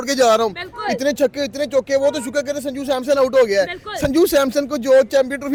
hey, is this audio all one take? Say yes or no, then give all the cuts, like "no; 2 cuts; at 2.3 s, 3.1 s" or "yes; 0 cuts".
yes; 0 cuts